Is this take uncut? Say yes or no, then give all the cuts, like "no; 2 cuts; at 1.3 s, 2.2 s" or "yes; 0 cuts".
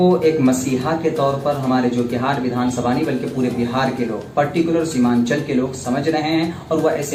yes; 0 cuts